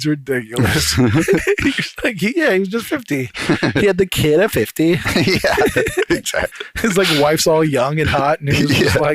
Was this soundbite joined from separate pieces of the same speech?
yes; 1 cut; at 6.6 s

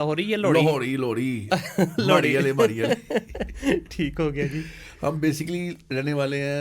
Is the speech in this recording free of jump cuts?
yes; 0 cuts

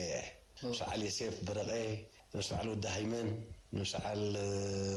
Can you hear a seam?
no; 0 cuts

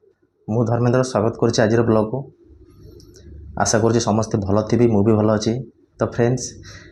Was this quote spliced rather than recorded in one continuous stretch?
no; 0 cuts

